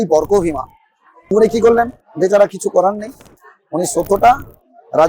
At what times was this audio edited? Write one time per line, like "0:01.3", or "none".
0:01.3